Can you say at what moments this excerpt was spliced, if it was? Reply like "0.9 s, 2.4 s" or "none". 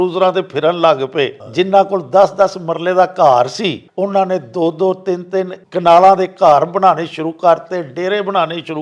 1.5 s, 3.8 s, 5.6 s